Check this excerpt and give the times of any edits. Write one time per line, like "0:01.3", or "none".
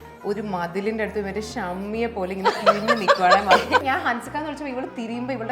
0:03.8